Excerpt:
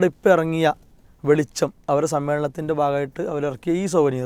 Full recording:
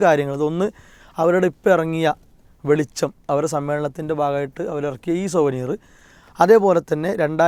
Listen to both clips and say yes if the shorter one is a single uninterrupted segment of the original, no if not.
yes